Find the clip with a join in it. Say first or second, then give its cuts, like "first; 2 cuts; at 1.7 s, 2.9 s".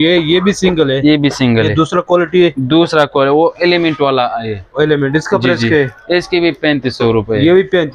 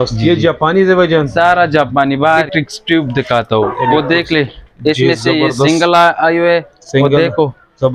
second; 1 cut; at 2.3 s